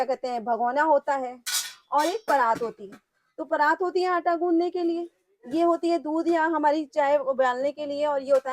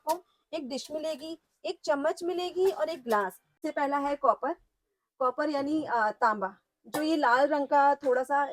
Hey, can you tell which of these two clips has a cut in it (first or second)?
second